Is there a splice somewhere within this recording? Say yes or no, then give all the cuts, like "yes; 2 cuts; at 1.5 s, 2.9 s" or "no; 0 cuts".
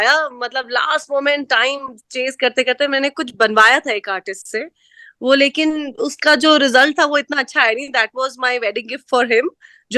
no; 0 cuts